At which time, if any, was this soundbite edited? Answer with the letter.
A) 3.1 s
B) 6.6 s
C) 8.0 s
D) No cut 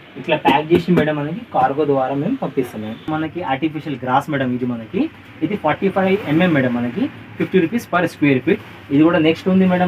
A